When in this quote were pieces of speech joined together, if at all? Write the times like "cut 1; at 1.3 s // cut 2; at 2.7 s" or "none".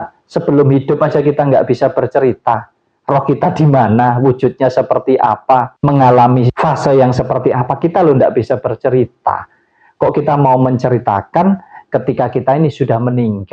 none